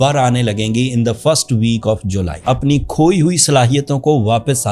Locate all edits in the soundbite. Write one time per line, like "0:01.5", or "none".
0:02.4